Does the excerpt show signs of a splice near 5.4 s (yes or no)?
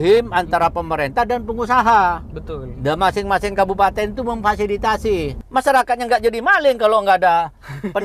yes